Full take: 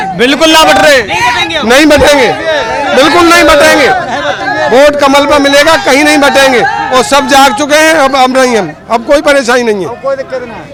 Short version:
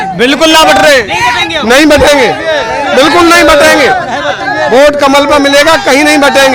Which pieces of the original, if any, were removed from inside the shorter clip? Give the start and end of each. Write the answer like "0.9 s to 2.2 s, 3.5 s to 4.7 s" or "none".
none